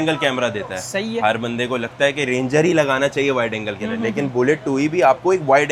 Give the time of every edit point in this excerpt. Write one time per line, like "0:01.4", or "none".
none